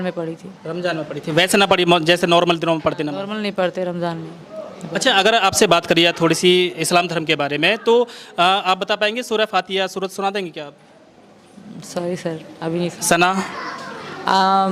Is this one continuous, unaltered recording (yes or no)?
yes